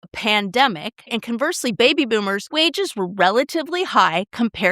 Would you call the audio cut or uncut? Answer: cut